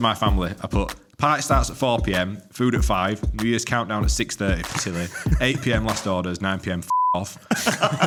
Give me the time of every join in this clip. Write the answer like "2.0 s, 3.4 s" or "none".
none